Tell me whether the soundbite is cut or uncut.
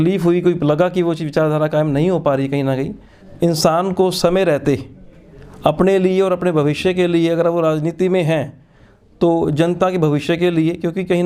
cut